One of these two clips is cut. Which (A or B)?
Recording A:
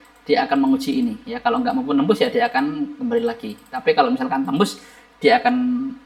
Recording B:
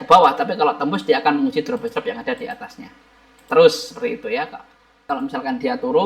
B